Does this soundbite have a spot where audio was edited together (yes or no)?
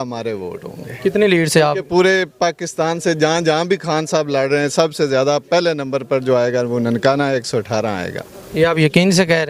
no